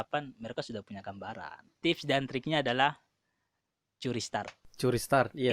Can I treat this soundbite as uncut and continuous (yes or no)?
no